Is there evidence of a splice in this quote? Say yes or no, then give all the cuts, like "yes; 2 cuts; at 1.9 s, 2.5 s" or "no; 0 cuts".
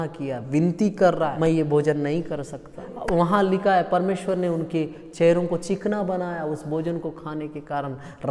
yes; 2 cuts; at 1.3 s, 2.9 s